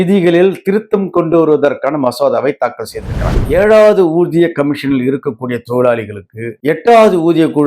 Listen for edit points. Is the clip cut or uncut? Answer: cut